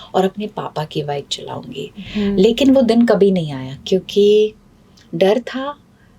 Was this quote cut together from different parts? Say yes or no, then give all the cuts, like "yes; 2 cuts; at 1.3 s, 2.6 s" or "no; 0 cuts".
no; 0 cuts